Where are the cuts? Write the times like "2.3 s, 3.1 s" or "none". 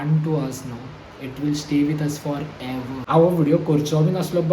3.0 s